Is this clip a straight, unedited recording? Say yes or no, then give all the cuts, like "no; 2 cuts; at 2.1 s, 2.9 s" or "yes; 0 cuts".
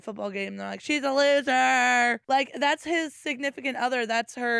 no; 1 cut; at 2.2 s